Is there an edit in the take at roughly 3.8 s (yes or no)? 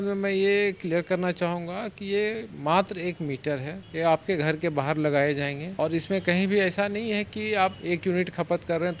yes